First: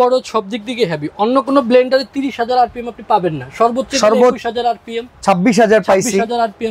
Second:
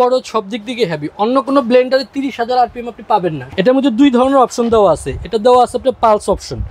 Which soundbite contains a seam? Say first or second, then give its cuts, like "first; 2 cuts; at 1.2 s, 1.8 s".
second; 1 cut; at 3.5 s